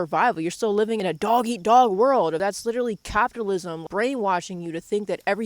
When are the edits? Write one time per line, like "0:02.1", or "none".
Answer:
0:01.0
0:02.4